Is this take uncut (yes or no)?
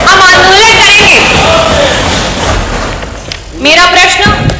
yes